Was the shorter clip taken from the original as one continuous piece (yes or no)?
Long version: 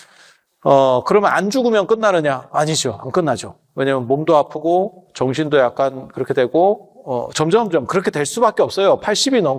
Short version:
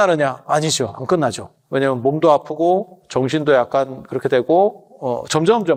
yes